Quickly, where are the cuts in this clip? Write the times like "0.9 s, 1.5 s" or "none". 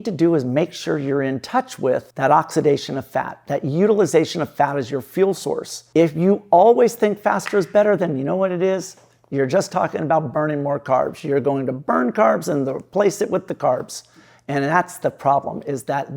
2.1 s, 5.7 s